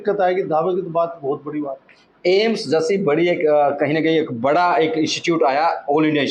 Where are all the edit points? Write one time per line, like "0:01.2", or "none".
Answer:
none